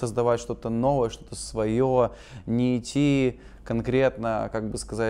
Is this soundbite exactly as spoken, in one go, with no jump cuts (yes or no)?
yes